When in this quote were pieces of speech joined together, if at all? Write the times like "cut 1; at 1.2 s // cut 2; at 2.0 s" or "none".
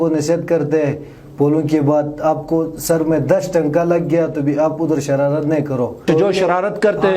cut 1; at 6.0 s